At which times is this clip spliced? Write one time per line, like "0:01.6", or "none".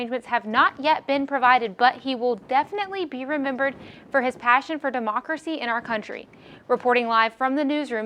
none